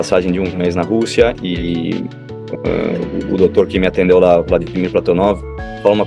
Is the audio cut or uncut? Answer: uncut